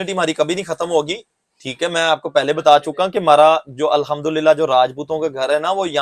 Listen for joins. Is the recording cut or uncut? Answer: uncut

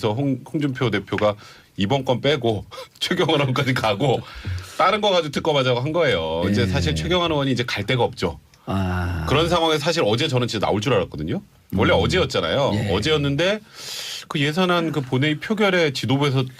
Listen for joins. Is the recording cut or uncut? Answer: uncut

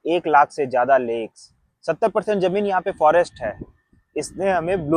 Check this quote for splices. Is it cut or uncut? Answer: uncut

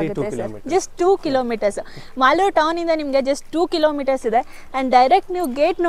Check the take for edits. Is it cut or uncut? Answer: uncut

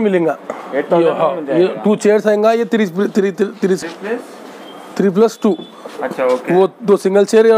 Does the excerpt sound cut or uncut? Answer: uncut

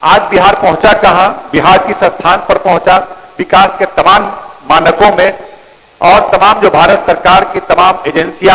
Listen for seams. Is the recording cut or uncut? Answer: uncut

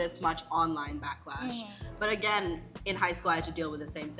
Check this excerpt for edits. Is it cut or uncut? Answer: uncut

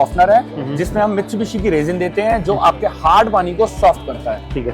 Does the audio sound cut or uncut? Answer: uncut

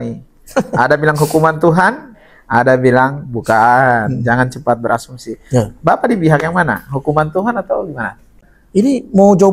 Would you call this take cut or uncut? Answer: cut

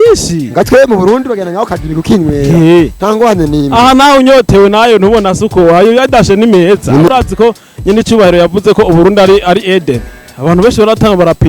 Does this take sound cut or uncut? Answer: cut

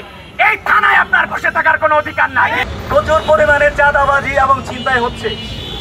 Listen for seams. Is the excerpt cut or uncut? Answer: cut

